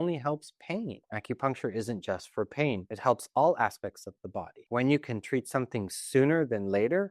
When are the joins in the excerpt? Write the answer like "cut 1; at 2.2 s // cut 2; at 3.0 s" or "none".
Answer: cut 1; at 1.1 s // cut 2; at 2.9 s // cut 3; at 4.5 s